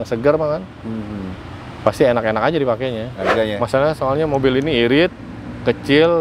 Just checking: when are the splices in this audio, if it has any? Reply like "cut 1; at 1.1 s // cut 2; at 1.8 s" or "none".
cut 1; at 3.3 s